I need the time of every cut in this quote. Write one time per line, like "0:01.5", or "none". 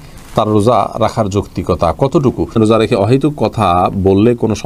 0:02.5